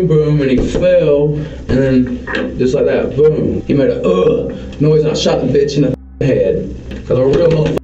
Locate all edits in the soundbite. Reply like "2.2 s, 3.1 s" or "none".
3.6 s, 6.9 s